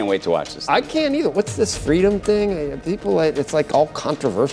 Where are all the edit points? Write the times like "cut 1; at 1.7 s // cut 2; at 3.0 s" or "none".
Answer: cut 1; at 1.3 s